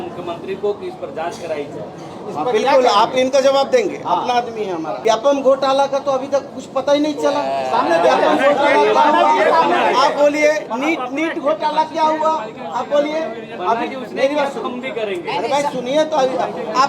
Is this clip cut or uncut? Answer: uncut